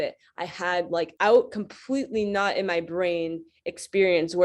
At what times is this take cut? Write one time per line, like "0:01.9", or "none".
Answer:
0:01.1